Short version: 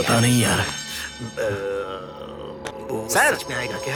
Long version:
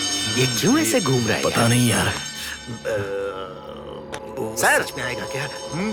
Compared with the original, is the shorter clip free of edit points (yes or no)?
yes